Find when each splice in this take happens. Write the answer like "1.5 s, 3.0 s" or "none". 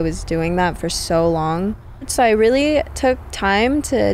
2.1 s